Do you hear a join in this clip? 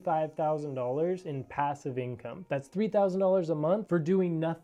no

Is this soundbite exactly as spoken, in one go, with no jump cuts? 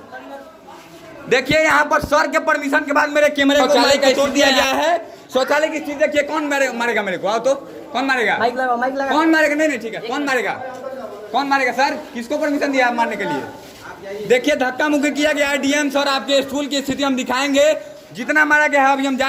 yes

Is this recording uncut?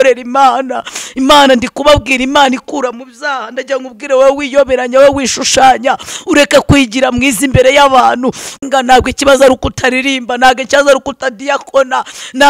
no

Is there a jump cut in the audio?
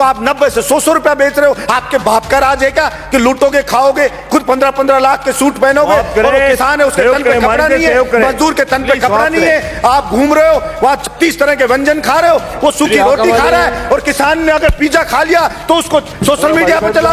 no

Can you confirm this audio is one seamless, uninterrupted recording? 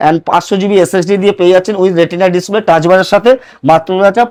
yes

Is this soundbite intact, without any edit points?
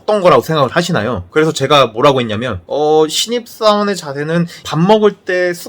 yes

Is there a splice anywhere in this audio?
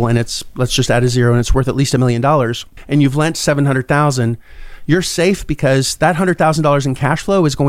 no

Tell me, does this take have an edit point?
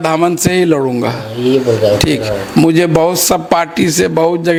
no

